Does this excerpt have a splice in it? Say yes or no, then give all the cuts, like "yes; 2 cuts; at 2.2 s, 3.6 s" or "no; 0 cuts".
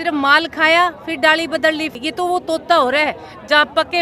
yes; 1 cut; at 1.9 s